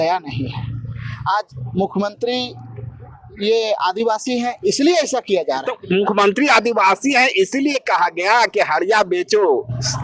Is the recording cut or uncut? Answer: uncut